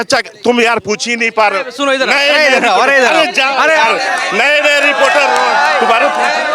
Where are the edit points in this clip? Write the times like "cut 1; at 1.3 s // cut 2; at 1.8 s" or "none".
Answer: none